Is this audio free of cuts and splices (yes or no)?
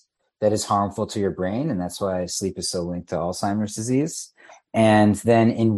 yes